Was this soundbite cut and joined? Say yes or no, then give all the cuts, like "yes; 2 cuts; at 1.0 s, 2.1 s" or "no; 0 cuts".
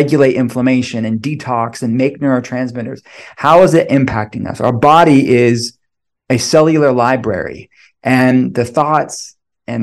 no; 0 cuts